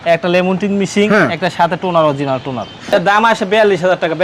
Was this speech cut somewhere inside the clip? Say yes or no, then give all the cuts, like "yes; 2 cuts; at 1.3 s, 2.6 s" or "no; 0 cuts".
yes; 1 cut; at 3.1 s